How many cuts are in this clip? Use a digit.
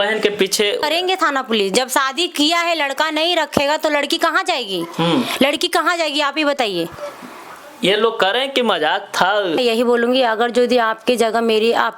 2